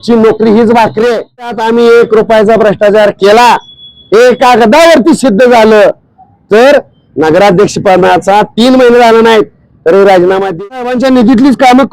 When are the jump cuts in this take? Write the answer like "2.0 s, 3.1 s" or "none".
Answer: 1.6 s, 10.6 s